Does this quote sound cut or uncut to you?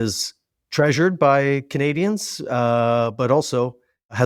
uncut